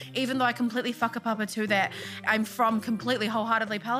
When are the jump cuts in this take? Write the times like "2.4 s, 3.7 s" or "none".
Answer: 2.2 s